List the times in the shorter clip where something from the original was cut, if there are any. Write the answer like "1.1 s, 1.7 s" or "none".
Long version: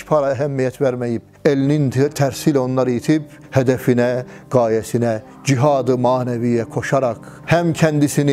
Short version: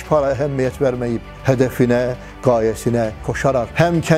1.3 s, 3.4 s